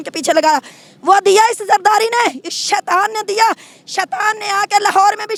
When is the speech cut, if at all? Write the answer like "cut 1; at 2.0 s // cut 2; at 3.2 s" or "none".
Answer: none

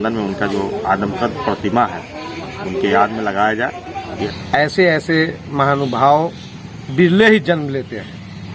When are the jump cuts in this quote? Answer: cut 1; at 4.1 s

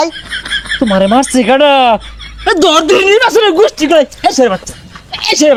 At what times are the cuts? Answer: none

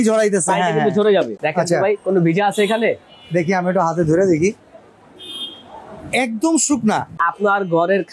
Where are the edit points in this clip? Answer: cut 1; at 1.4 s // cut 2; at 7.2 s

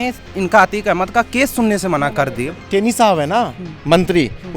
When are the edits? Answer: cut 1; at 2.6 s

